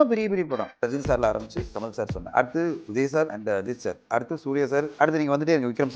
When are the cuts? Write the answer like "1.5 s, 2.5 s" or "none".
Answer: 0.8 s, 2.2 s, 3.4 s, 4.9 s

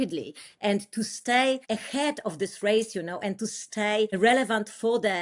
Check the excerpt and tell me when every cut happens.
1.6 s, 4.1 s

